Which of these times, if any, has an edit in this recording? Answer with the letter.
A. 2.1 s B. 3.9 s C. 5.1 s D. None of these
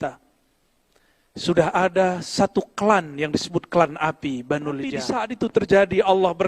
C